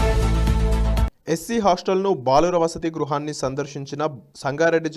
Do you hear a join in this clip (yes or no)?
yes